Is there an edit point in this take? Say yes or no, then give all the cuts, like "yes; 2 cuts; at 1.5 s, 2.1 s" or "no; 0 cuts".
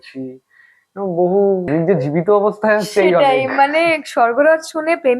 yes; 1 cut; at 1.7 s